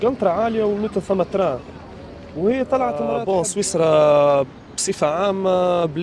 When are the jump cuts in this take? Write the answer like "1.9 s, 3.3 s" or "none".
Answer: 3.2 s